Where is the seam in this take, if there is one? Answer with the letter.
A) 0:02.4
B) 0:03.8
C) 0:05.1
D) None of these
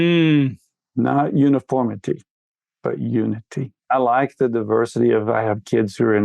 B